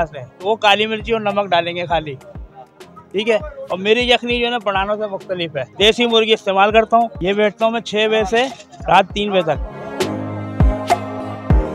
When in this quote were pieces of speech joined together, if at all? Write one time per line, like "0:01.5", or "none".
0:05.7
0:07.2
0:09.8